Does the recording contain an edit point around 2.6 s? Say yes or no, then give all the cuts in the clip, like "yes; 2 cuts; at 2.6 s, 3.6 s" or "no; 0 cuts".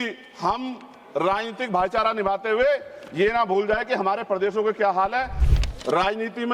no; 1 cut; at 5.4 s